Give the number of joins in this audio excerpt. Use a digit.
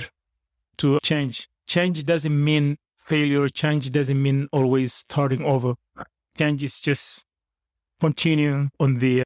1